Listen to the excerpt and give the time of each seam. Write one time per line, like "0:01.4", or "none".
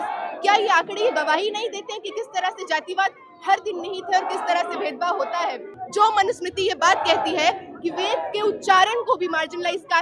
0:05.8